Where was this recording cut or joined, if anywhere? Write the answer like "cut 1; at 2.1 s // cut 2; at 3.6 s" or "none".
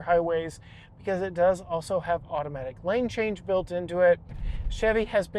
cut 1; at 4.3 s

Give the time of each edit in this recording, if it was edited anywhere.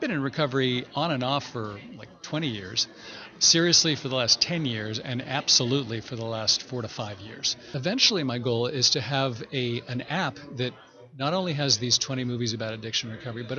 cut 1; at 7.7 s

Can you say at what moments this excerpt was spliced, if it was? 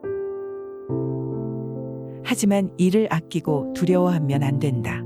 none

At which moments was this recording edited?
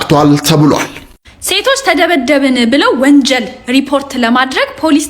cut 1; at 1.1 s

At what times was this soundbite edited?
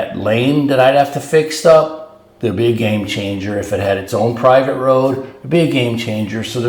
none

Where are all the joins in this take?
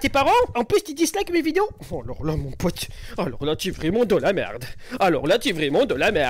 none

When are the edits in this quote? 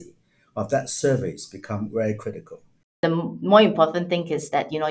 cut 1; at 3.0 s

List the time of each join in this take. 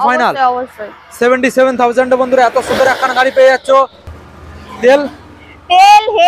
cut 1; at 4.1 s

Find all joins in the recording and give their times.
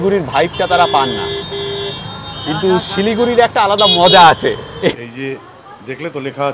cut 1; at 5.0 s

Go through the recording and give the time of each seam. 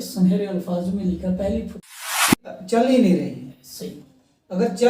cut 1; at 2.2 s

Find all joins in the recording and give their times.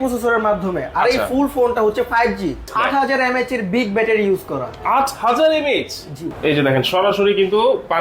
cut 1; at 2.7 s // cut 2; at 6.3 s

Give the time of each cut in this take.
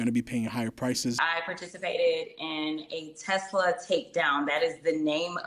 cut 1; at 1.2 s

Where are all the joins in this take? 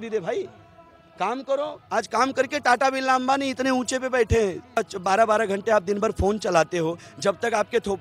cut 1; at 4.8 s

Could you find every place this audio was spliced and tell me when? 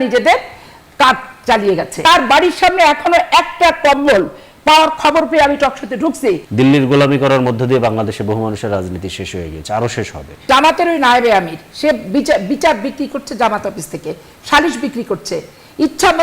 cut 1; at 2.0 s // cut 2; at 6.5 s // cut 3; at 10.5 s

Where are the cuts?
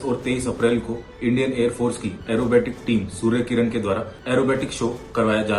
cut 1; at 4.1 s

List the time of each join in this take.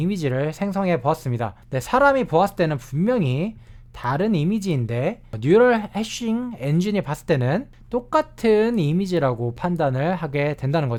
none

